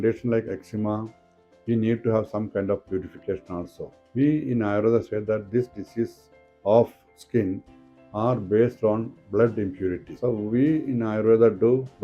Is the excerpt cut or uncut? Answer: cut